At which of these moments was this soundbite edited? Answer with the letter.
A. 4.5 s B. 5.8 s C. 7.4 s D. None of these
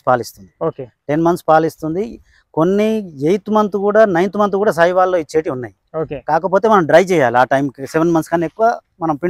D